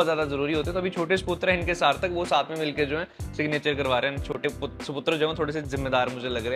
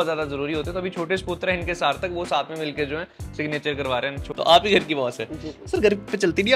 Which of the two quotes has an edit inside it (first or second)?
second